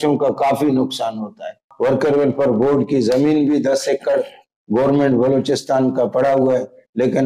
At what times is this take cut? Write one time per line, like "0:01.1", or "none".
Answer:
0:01.6